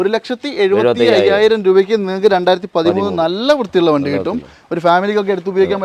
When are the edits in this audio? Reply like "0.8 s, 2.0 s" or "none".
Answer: none